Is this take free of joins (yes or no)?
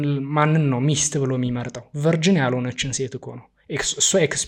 yes